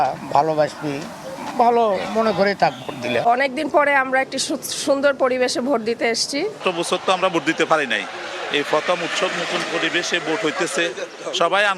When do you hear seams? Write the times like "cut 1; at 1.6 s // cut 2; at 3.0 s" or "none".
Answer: cut 1; at 3.1 s // cut 2; at 6.6 s